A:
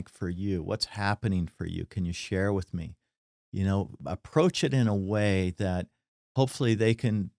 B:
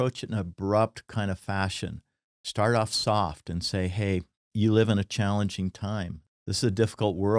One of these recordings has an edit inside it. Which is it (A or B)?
B